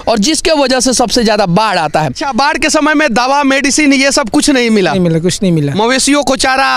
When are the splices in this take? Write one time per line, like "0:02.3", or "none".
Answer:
0:02.2